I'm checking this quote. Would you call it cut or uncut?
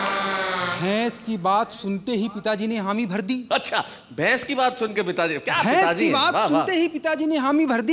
uncut